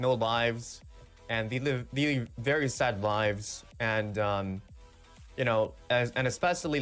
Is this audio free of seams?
yes; 0 cuts

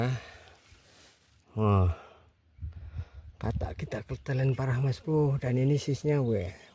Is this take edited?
no; 0 cuts

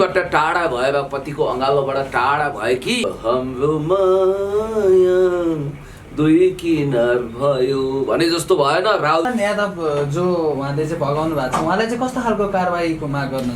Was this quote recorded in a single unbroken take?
no; 2 cuts; at 3.0 s, 9.3 s

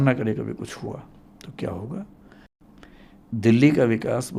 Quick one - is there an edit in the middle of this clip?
yes; 1 cut; at 2.6 s

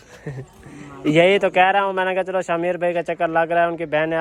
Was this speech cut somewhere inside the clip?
no; 0 cuts

